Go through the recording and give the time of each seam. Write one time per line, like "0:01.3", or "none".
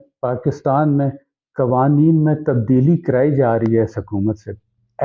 none